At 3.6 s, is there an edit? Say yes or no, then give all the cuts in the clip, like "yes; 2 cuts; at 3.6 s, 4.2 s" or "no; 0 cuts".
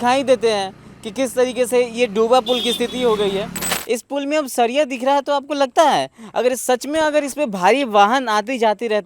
yes; 1 cut; at 3.6 s